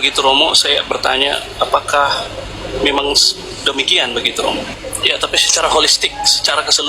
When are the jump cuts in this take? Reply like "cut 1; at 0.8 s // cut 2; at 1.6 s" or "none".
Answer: cut 1; at 4.7 s